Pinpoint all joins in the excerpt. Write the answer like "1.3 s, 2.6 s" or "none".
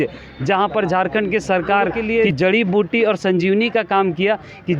2.0 s

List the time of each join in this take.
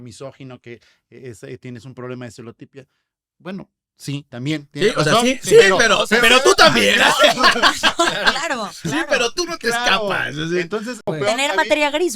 11.0 s

